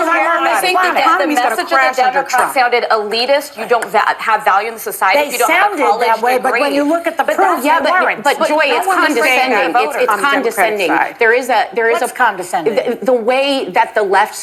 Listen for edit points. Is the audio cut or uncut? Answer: uncut